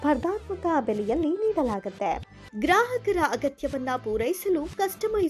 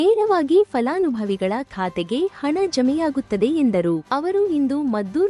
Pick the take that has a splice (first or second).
second